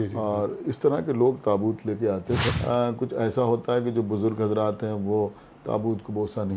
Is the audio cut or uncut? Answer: cut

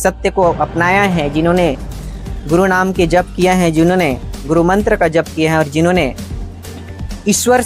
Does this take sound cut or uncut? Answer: uncut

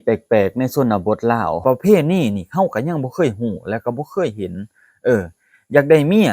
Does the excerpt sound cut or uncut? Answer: cut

